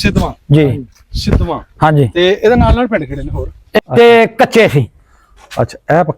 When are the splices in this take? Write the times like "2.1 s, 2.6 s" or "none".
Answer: 3.8 s